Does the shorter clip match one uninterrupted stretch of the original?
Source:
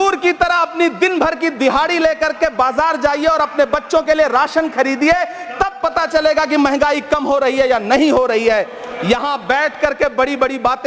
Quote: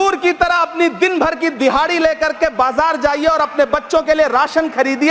yes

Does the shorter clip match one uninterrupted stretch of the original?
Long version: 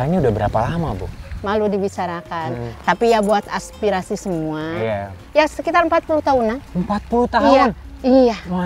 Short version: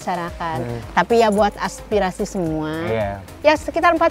yes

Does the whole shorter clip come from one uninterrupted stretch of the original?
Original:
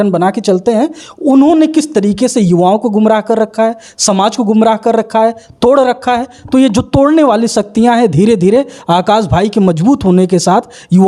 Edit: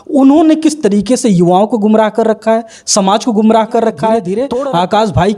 no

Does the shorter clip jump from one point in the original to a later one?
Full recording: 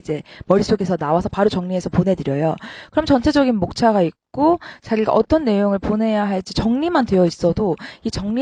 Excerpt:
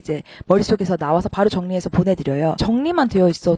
yes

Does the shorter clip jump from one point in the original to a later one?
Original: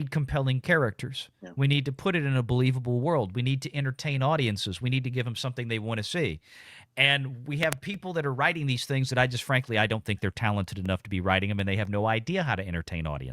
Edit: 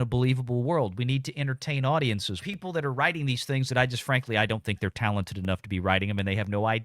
yes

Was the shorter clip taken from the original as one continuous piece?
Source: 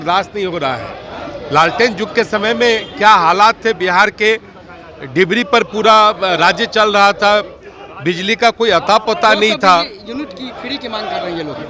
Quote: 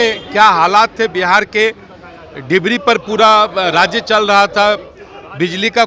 yes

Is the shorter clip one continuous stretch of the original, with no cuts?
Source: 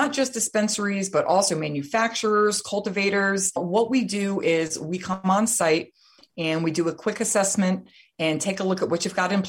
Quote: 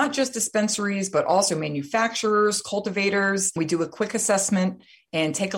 no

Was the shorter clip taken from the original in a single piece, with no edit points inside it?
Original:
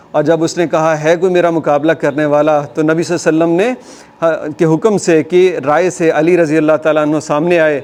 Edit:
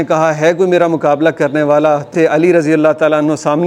no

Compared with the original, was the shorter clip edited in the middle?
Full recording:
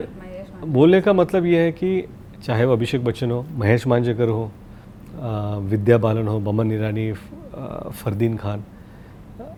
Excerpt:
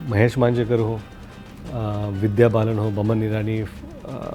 no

